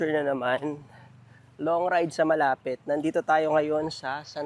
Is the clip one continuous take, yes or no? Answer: yes